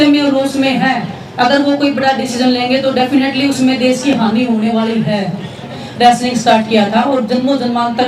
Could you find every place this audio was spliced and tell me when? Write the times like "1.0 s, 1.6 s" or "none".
5.8 s